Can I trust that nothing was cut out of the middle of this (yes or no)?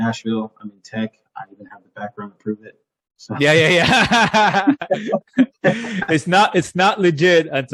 yes